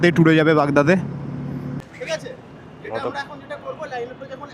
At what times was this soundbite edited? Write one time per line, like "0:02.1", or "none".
0:01.8